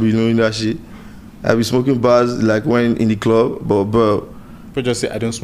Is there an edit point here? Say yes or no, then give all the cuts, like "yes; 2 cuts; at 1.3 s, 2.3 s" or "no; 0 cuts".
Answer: no; 0 cuts